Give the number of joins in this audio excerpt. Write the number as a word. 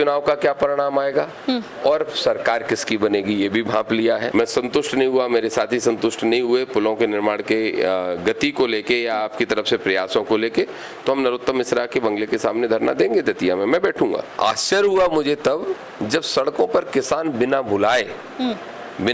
two